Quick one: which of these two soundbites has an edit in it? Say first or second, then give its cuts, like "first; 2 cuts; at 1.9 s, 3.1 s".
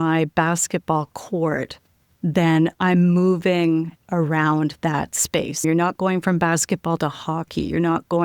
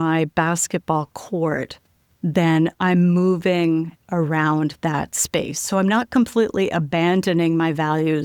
first; 1 cut; at 5.6 s